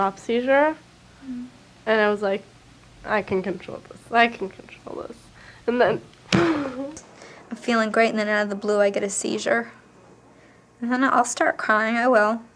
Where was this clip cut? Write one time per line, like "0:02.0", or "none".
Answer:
0:08.3